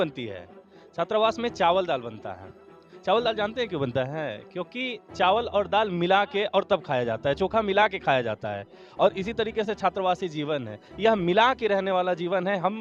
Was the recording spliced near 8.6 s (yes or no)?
no